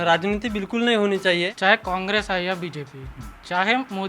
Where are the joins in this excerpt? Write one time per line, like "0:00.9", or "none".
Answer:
0:01.5